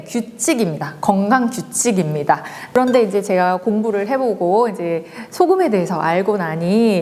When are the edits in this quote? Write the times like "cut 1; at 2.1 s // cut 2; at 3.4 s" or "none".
cut 1; at 2.5 s